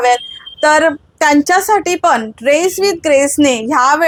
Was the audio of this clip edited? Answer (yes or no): no